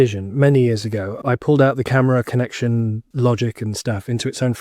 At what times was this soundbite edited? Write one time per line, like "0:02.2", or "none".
0:01.1
0:03.0